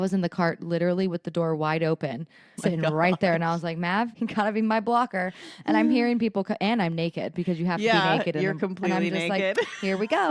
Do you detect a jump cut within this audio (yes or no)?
yes